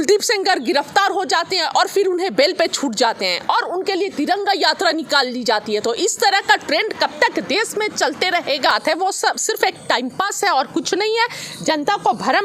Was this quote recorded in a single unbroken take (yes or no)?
no